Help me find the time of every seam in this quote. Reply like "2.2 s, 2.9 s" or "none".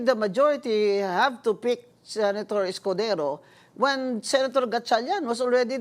none